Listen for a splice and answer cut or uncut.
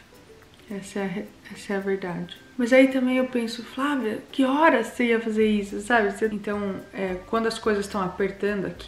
cut